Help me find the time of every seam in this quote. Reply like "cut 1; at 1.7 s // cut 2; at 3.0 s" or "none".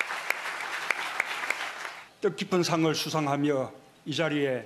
cut 1; at 2.8 s